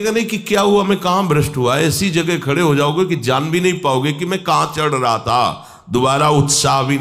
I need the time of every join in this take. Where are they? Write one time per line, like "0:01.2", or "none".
none